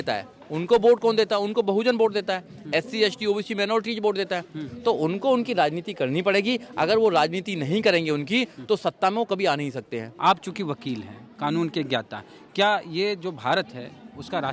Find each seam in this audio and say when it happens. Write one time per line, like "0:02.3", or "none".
0:10.0

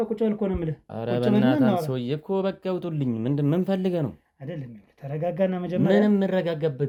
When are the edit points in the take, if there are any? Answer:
none

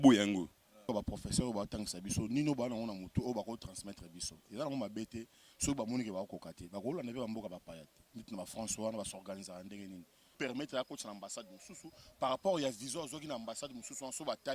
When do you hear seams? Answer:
0:00.9
0:10.4

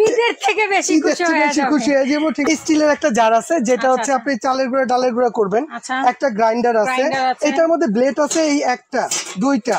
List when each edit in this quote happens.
0:02.5

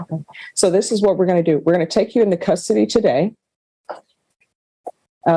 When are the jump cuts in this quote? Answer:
none

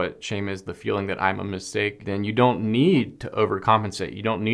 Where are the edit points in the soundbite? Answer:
0:02.0

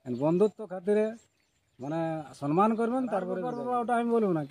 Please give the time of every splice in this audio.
0:03.5

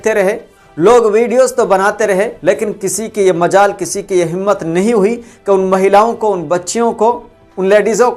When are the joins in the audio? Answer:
0:02.3

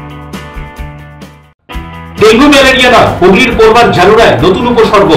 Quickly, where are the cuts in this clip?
0:01.5

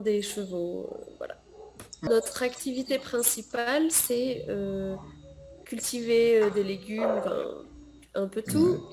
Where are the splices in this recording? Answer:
0:02.1

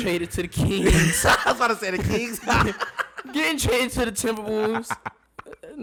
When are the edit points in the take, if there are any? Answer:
none

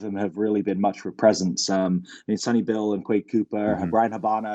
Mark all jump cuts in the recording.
none

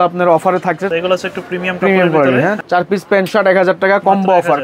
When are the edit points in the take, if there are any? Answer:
0:00.9
0:02.6

